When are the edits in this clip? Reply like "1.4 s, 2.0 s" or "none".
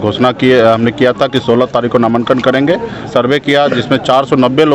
3.1 s